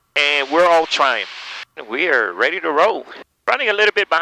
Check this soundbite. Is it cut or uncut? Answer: cut